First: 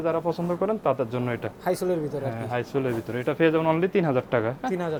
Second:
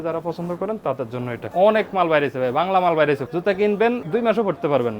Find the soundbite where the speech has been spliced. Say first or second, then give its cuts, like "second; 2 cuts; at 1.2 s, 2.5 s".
second; 3 cuts; at 1.4 s, 3.2 s, 4.0 s